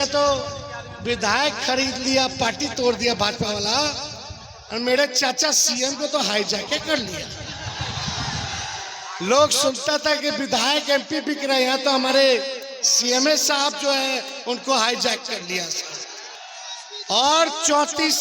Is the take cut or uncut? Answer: cut